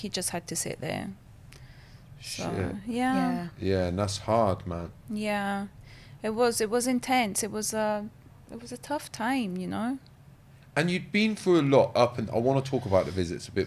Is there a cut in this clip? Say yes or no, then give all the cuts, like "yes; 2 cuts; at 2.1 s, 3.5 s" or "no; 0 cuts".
no; 0 cuts